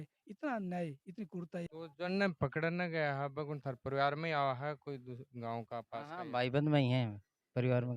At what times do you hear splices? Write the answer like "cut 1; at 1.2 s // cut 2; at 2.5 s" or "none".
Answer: cut 1; at 1.7 s